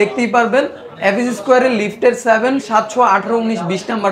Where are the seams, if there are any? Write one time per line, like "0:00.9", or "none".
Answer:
none